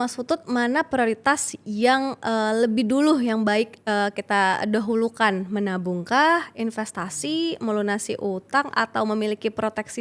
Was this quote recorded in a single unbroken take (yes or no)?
yes